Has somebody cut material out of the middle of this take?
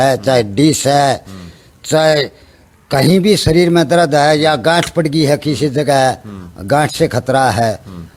no; 0 cuts

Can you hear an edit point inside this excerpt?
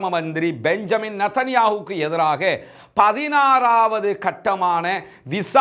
no; 0 cuts

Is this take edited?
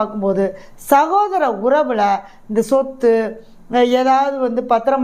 no; 0 cuts

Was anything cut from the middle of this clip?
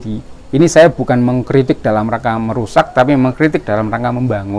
no; 0 cuts

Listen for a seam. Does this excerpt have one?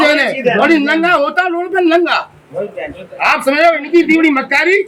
no; 0 cuts

